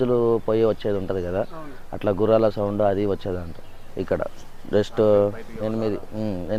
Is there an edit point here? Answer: no; 0 cuts

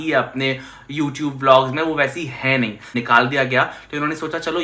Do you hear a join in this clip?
yes; 1 cut; at 2.9 s

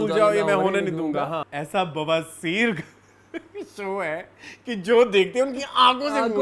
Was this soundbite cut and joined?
yes; 1 cut; at 1.5 s

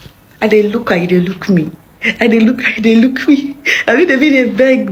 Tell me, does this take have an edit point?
no; 0 cuts

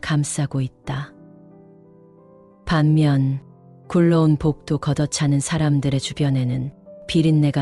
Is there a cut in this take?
yes; 2 cuts; at 1.1 s, 2.6 s

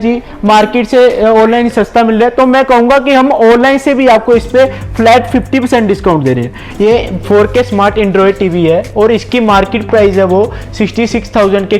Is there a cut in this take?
yes; 1 cut; at 6.6 s

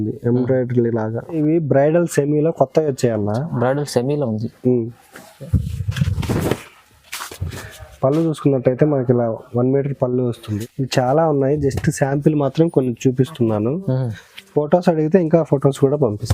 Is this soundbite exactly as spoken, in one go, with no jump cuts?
no; 2 cuts; at 1.3 s, 10.5 s

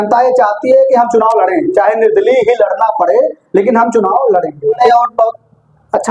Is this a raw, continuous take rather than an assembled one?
no; 1 cut; at 4.8 s

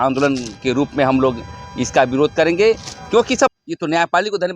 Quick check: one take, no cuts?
no; 1 cut; at 3.5 s

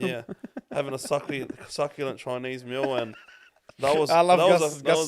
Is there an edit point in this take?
no; 0 cuts

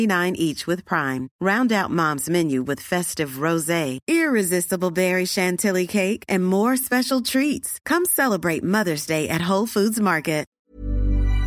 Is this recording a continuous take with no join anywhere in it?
no; 1 cut; at 10.5 s

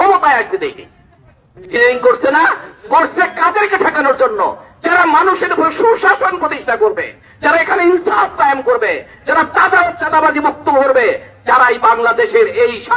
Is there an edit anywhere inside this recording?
yes; 1 cut; at 1.7 s

